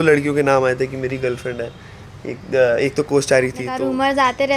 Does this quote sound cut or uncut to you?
cut